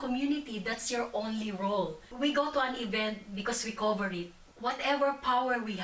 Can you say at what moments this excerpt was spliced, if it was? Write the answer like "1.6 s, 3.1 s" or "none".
2.0 s, 4.4 s